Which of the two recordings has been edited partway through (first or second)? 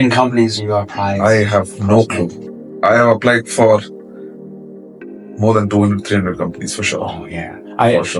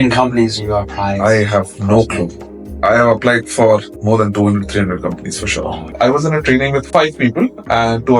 second